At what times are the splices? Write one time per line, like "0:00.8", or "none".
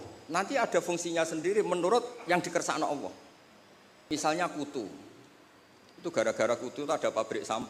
0:04.1